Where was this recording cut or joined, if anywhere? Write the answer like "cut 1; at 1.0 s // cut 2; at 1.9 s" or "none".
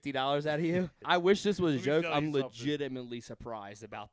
cut 1; at 1.0 s